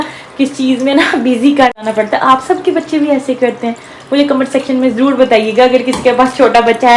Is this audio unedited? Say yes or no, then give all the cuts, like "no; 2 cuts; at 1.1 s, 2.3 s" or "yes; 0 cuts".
no; 1 cut; at 1.8 s